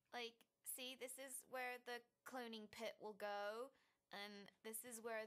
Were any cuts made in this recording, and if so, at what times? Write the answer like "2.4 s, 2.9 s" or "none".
none